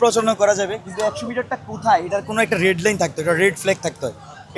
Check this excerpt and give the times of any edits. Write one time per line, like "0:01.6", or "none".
none

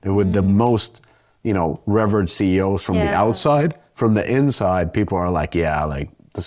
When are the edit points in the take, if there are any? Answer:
none

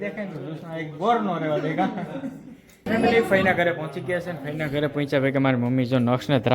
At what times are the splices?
0:02.8

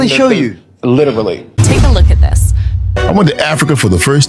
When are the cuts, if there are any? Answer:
0:01.6

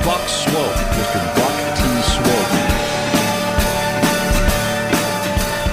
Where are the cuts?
none

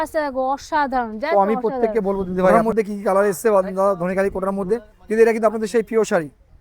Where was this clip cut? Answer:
0:02.6

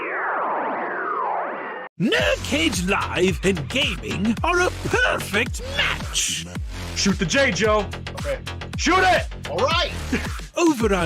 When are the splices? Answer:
0:01.8

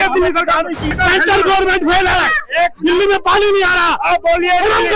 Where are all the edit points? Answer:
0:00.9

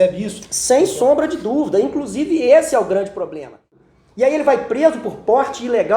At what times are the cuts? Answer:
0:03.8

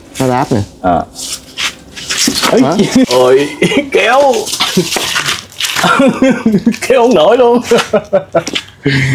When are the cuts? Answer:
0:03.1

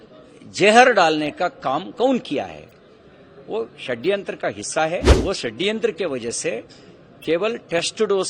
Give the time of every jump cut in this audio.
0:05.1

